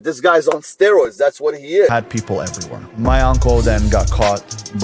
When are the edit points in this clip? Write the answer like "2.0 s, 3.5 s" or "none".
1.9 s